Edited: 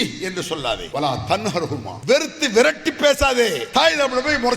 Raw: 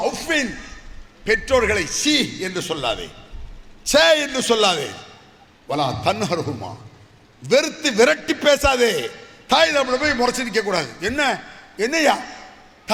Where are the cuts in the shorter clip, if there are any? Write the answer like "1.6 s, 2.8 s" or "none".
0.8 s, 1.9 s, 3.6 s

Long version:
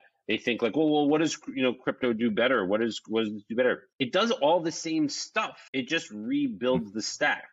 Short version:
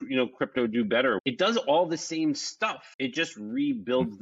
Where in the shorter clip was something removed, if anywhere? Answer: 1.2 s

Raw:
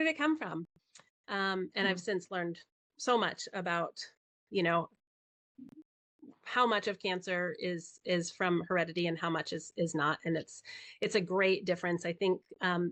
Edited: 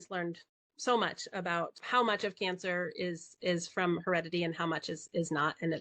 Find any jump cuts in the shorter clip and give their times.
1.8 s

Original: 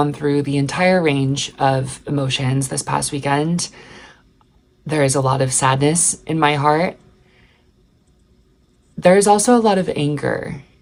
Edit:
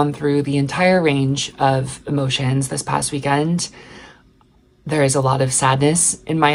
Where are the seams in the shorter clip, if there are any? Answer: none

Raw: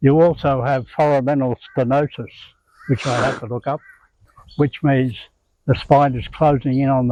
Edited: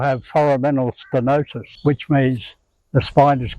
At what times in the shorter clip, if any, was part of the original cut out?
1.6 s

